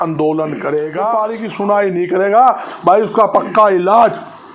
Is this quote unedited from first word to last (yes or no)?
no